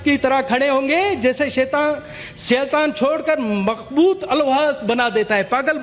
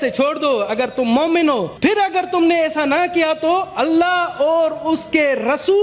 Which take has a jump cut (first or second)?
second